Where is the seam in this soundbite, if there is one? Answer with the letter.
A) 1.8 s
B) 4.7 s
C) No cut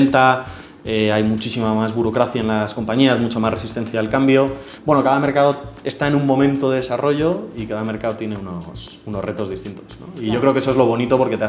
B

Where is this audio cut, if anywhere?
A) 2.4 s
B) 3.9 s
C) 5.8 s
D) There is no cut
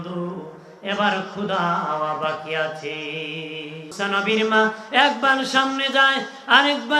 B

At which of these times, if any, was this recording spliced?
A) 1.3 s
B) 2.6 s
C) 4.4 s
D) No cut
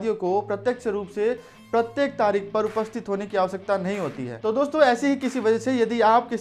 C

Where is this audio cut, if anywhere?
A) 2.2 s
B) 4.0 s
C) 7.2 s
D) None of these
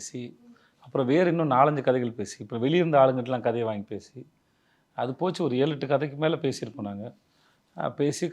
D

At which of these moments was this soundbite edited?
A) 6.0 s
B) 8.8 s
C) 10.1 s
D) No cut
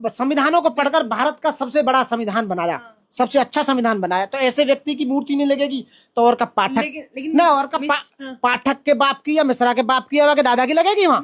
D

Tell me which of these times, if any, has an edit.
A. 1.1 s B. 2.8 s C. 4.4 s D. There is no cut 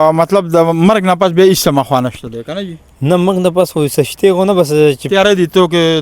D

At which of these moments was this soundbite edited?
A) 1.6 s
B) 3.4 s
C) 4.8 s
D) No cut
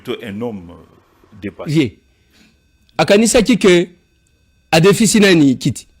A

